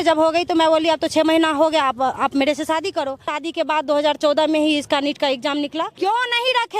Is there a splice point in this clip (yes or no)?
yes